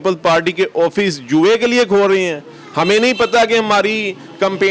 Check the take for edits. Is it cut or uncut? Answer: uncut